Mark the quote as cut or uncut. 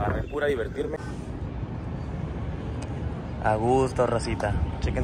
cut